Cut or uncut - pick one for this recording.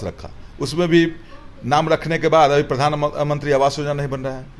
uncut